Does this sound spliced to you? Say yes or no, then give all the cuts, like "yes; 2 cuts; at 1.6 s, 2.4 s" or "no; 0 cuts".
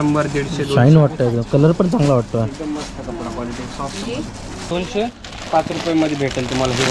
yes; 1 cut; at 4.6 s